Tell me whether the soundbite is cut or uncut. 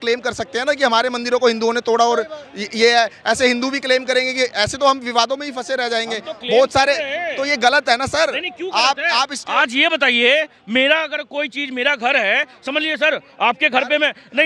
uncut